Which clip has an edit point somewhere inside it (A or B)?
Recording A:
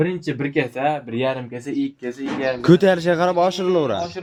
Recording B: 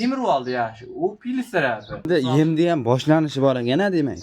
B